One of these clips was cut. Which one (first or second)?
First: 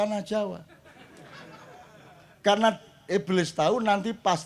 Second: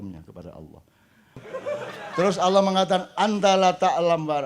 second